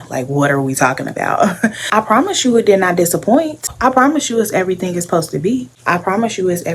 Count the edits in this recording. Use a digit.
1